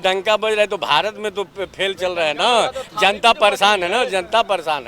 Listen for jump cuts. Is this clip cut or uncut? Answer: uncut